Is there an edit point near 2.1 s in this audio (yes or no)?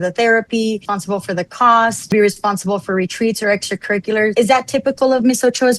yes